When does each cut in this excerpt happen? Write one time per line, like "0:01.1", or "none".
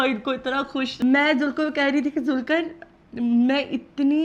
0:00.9